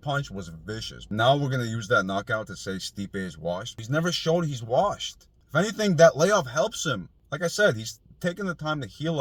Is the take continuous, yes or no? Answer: yes